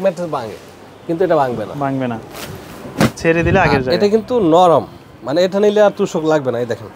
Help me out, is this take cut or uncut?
uncut